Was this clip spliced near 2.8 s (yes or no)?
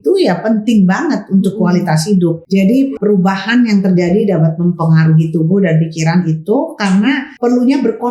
yes